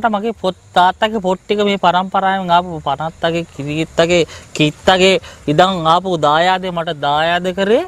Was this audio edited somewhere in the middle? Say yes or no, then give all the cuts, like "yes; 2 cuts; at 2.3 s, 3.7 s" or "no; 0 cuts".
no; 0 cuts